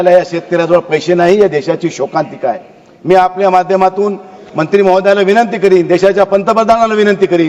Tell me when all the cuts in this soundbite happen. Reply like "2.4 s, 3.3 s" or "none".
none